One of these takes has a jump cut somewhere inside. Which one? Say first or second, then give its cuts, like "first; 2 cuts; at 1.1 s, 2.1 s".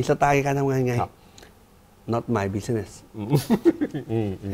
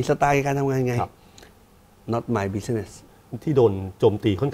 second; 1 cut; at 3.1 s